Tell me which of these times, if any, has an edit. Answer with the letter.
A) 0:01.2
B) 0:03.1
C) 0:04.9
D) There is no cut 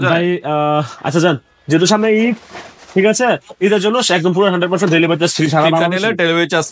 D